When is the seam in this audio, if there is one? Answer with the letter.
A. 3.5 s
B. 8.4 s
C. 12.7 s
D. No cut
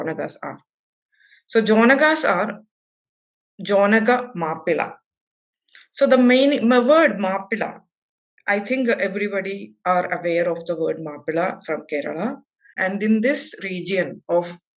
C